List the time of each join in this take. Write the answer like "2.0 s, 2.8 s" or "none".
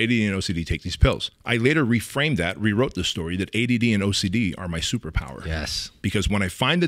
1.3 s